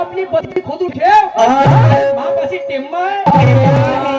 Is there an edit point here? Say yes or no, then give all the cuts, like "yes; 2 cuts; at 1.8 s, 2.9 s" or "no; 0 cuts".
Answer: no; 0 cuts